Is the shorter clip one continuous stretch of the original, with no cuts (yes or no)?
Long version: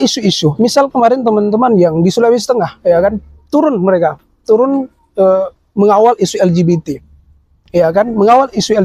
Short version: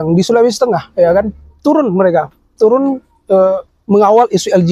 yes